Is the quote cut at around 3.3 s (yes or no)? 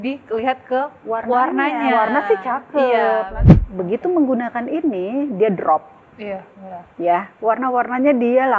yes